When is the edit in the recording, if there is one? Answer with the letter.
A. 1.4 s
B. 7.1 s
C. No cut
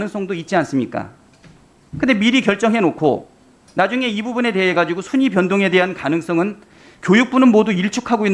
C